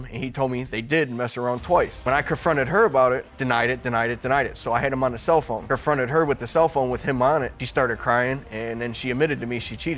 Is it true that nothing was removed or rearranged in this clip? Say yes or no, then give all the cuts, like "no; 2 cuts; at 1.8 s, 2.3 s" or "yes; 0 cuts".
yes; 0 cuts